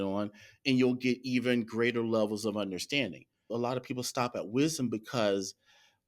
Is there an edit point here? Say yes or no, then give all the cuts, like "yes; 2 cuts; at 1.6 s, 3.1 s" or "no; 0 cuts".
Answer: yes; 1 cut; at 3.5 s